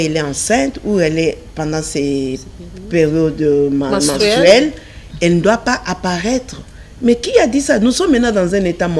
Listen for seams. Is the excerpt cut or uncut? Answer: uncut